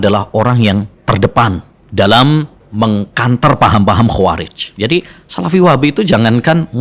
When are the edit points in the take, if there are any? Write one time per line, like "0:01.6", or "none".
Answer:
0:00.9
0:01.7
0:02.6
0:04.6